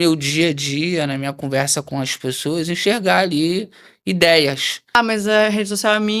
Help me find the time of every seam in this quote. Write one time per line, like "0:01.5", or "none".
0:05.0